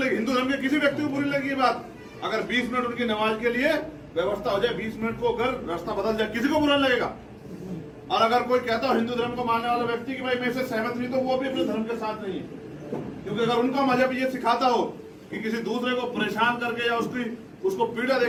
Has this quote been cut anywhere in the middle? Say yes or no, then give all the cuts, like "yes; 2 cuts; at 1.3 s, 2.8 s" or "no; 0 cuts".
no; 0 cuts